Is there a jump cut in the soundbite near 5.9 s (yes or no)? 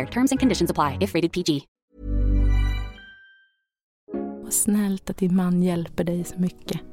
no